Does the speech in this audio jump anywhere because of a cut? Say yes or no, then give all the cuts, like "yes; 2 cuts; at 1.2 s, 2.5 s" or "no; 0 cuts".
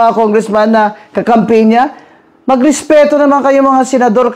no; 0 cuts